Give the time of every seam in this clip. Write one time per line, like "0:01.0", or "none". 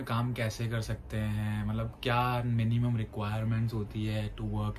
none